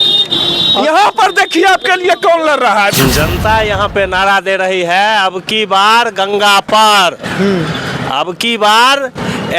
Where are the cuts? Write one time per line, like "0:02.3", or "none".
0:03.0